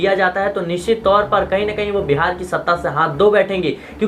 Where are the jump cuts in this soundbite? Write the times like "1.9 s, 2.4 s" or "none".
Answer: none